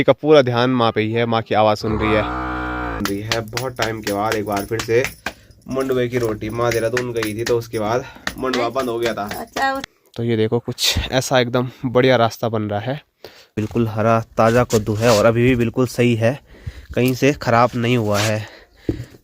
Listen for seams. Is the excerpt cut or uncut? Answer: cut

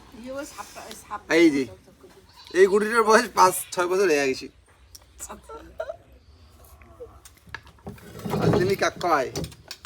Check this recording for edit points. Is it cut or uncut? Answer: uncut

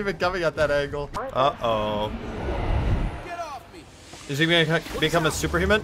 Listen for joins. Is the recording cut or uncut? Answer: cut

